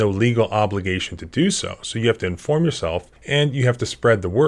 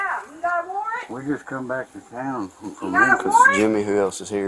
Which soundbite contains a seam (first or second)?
first